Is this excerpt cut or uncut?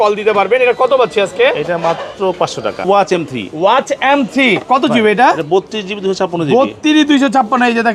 cut